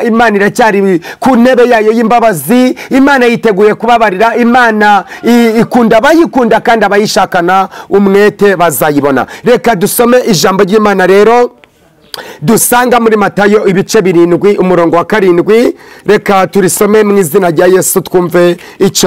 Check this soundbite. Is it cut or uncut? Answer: uncut